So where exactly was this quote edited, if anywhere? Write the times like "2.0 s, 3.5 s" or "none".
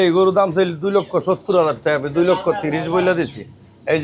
none

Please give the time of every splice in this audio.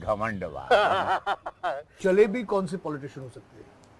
2.0 s

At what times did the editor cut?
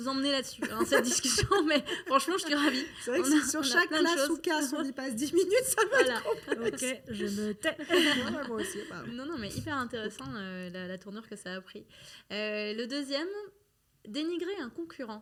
none

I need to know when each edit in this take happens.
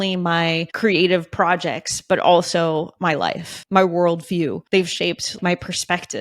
3.5 s, 4.9 s

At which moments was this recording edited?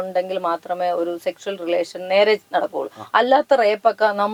none

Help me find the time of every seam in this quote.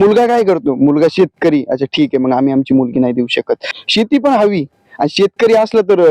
3.7 s

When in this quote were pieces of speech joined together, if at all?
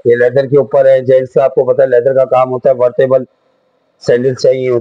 none

